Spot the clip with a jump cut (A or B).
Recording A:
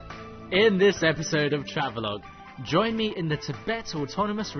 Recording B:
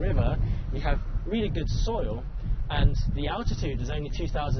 B